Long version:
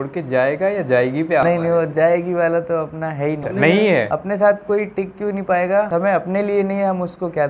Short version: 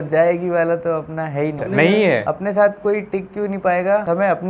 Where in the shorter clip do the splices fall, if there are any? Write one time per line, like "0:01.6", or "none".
none